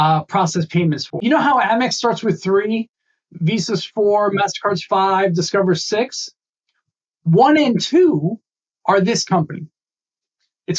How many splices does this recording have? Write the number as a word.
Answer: one